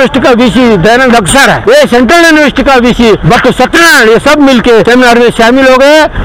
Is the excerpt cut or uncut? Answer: cut